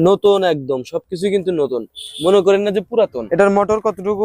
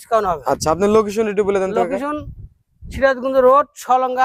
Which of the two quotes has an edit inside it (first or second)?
first